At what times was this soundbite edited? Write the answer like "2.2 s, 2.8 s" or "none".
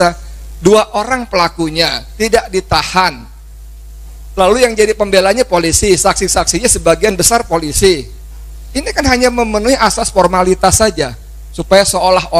none